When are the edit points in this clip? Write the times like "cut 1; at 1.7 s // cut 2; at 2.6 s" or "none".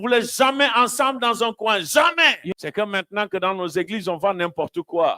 cut 1; at 2.4 s